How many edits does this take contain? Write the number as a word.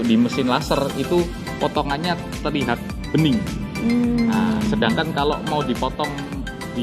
zero